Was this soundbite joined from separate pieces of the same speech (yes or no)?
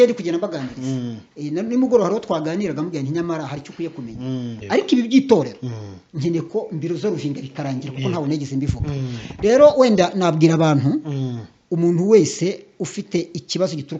yes